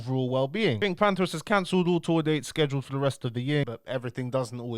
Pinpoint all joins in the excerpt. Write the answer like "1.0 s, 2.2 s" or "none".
0.8 s, 3.7 s